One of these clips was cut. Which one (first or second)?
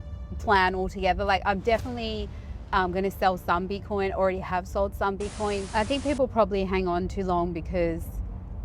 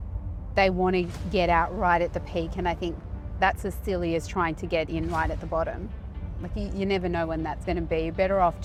first